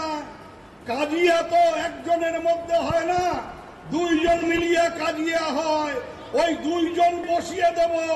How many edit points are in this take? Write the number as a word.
one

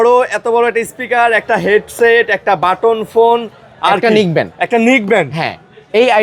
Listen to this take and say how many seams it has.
zero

